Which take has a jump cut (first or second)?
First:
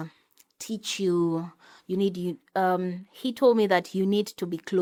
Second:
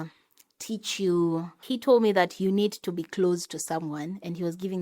second